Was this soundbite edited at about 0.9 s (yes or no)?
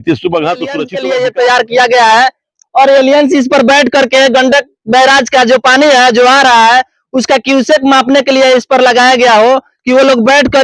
yes